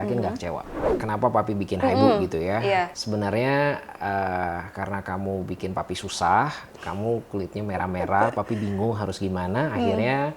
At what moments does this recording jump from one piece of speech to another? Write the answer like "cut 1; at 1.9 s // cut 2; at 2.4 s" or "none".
cut 1; at 0.9 s // cut 2; at 3.0 s